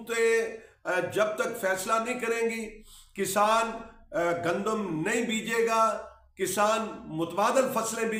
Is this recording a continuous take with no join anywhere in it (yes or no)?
yes